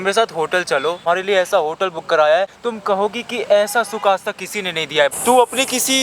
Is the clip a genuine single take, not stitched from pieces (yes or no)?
no